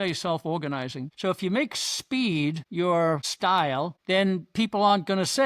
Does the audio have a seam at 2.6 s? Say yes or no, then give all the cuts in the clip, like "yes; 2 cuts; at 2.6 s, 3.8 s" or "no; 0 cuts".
yes; 3 cuts; at 1.0 s, 2.6 s, 3.6 s